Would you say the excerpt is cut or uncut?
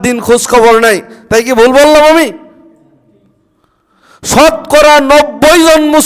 uncut